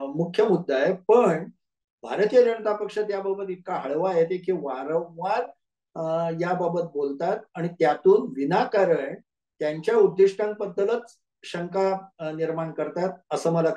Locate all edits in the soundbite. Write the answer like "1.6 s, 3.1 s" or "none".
none